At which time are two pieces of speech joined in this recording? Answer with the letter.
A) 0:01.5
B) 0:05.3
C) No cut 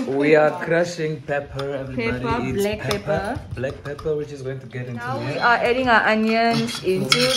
B